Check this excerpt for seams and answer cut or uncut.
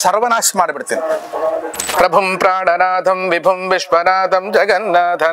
cut